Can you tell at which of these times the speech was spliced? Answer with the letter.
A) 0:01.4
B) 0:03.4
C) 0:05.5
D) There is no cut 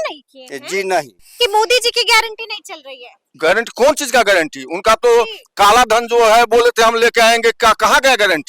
A